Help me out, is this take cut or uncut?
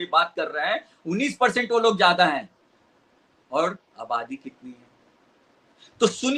uncut